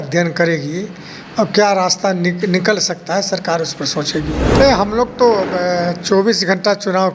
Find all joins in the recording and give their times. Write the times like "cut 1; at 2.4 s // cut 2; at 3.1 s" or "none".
cut 1; at 4.4 s